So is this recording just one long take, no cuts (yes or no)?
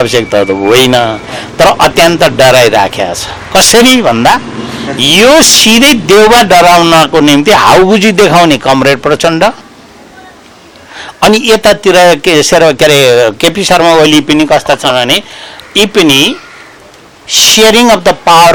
yes